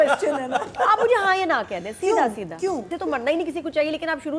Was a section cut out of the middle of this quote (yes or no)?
yes